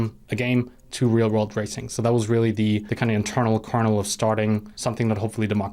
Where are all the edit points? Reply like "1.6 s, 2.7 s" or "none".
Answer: 2.9 s, 4.7 s